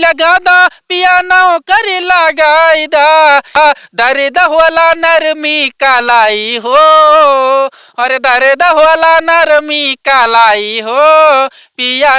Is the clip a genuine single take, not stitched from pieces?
no; 1 cut; at 3.6 s

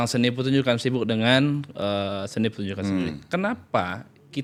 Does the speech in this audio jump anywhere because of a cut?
no; 0 cuts

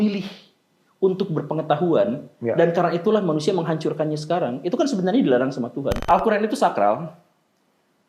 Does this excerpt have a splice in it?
yes; 1 cut; at 5.9 s

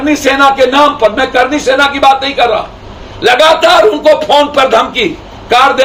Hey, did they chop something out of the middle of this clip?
no; 0 cuts

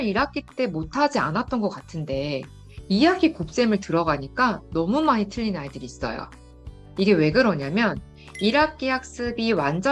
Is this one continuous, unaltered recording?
yes; 0 cuts

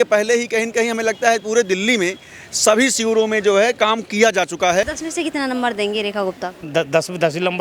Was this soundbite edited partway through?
yes; 2 cuts; at 5.0 s, 6.6 s

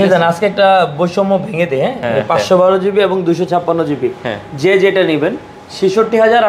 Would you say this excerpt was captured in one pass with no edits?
yes; 0 cuts

